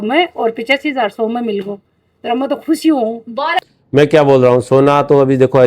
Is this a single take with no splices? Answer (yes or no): no